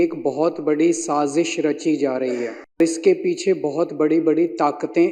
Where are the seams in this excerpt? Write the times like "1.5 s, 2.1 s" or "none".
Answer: 2.8 s